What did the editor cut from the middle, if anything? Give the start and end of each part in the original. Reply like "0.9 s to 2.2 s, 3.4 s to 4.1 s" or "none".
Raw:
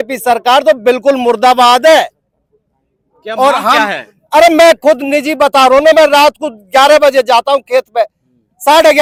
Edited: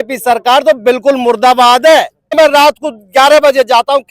2.3 s to 5.9 s